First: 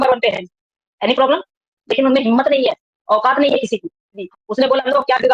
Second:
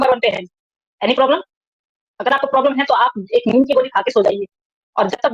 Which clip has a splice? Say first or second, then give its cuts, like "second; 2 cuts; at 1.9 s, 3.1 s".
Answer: first; 2 cuts; at 1.8 s, 4.2 s